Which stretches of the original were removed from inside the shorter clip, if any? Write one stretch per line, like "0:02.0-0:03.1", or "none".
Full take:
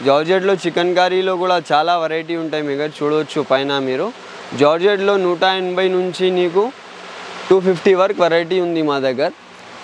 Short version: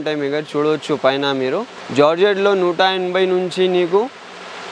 0:04.2-0:04.4